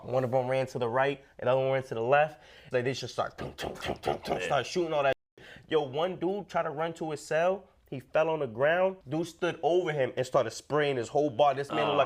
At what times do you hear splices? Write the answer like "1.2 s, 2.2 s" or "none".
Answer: 2.6 s, 9.0 s